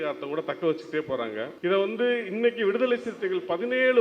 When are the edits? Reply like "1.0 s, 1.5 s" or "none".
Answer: 1.5 s